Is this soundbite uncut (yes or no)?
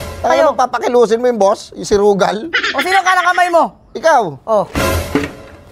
yes